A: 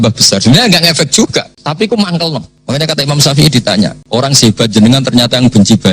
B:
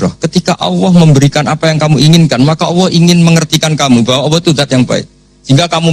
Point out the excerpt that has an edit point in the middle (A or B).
A